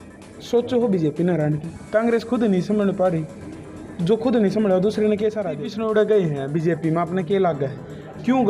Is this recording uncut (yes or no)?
no